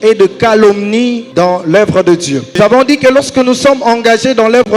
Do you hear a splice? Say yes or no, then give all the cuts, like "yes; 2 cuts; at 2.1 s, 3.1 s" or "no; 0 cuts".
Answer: yes; 2 cuts; at 1.2 s, 2.5 s